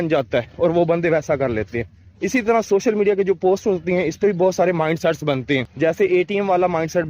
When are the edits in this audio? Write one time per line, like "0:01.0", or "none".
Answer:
0:05.7